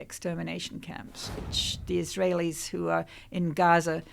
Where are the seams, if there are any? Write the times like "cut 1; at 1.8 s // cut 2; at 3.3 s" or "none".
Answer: cut 1; at 1.4 s